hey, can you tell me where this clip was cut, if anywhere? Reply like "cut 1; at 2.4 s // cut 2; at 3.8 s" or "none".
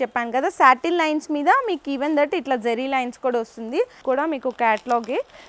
cut 1; at 4.0 s